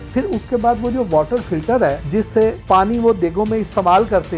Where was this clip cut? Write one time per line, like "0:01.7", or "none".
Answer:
0:02.4